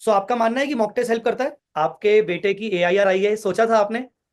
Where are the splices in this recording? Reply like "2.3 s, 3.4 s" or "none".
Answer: 1.6 s